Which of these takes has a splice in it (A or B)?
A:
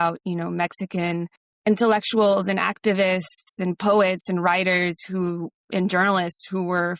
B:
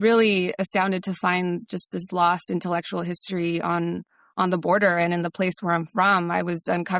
A